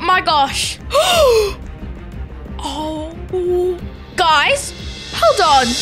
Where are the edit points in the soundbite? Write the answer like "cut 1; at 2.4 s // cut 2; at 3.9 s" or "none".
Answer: none